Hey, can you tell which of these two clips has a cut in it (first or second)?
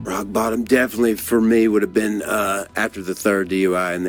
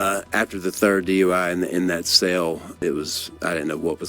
second